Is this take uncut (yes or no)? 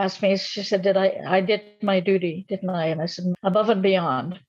no